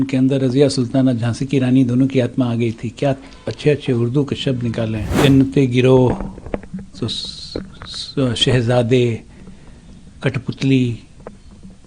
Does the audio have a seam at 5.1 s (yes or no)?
yes